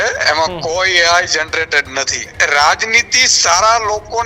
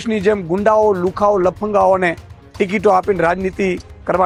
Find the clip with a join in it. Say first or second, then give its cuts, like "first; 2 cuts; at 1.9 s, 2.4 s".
first; 1 cut; at 2.3 s